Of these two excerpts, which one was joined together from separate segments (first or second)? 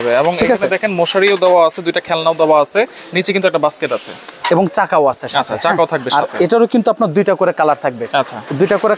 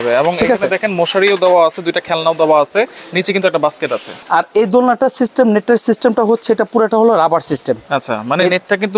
second